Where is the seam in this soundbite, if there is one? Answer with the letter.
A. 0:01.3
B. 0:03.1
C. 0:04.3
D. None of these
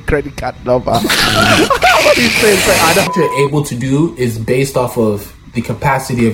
B